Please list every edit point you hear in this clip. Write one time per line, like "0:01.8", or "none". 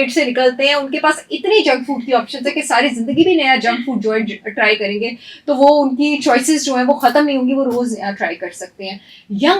none